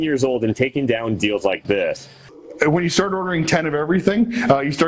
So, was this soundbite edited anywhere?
yes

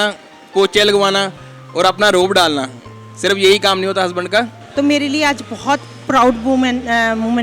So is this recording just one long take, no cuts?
no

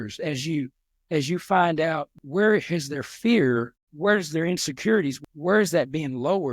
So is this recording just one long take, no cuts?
no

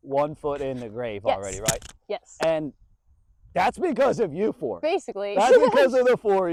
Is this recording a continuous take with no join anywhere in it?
yes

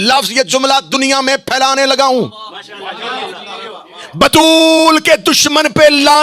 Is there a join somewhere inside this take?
no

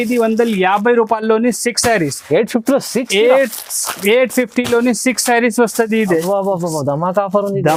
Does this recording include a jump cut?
no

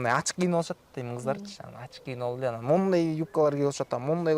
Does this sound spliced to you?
no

